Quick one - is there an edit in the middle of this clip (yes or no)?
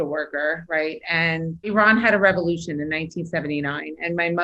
yes